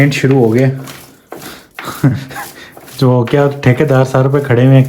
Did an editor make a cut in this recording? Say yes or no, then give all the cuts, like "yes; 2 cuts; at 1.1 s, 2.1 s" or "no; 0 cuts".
no; 0 cuts